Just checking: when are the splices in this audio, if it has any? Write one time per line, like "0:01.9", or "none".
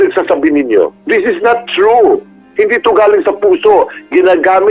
0:01.0